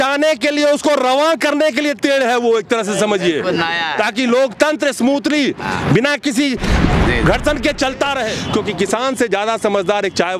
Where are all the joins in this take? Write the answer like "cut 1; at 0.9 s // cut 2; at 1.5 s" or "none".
cut 1; at 8.3 s